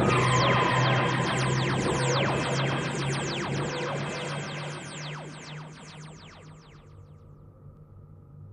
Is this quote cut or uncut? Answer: cut